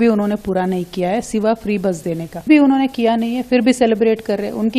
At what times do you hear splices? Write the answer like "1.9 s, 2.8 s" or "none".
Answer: 2.4 s